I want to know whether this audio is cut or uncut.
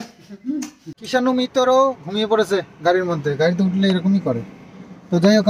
cut